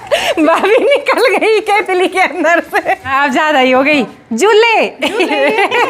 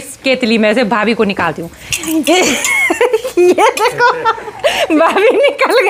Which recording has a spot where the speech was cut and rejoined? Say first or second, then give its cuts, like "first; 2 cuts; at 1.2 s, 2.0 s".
first; 1 cut; at 3.1 s